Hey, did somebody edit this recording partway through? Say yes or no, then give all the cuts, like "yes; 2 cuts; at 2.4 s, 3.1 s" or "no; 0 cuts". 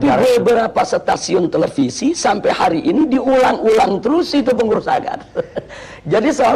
no; 0 cuts